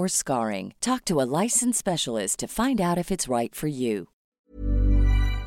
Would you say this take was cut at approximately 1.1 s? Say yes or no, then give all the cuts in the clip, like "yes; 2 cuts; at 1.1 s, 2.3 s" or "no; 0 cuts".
no; 1 cut; at 4.2 s